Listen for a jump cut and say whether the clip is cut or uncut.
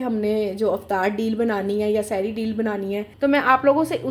cut